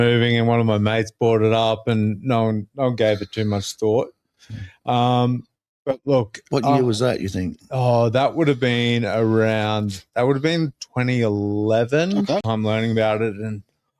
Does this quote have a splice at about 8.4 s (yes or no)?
no